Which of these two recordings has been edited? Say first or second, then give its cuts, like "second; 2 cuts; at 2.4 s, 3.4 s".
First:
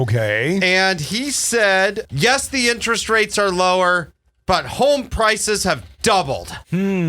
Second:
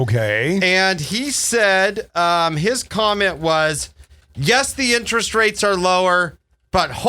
first; 1 cut; at 2.0 s